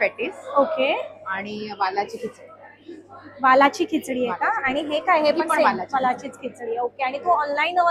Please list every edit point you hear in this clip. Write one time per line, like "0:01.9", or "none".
none

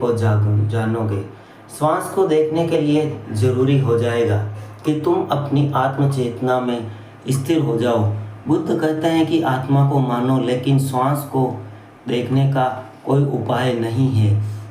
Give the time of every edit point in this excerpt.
0:13.5

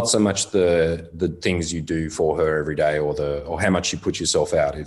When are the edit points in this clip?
none

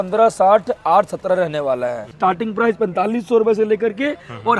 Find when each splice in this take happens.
0:02.2

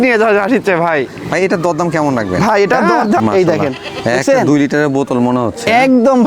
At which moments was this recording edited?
0:03.2

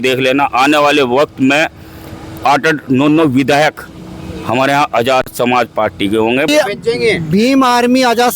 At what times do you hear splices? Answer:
0:06.5

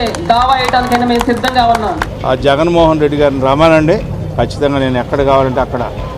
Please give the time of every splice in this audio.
0:02.1

